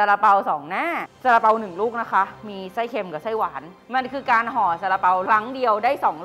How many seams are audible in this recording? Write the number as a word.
three